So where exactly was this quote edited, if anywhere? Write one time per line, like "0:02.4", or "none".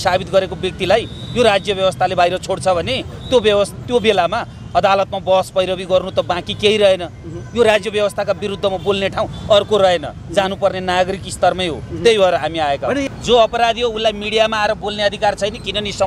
0:13.1